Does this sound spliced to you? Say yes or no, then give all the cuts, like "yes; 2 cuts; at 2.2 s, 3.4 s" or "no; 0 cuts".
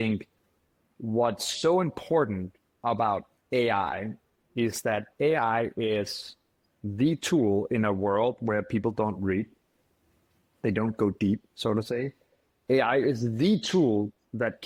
no; 0 cuts